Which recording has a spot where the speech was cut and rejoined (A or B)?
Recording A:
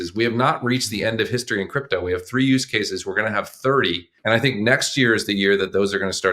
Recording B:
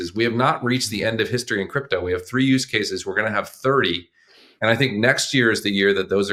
A